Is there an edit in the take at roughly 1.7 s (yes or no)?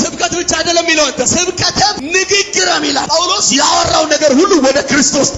yes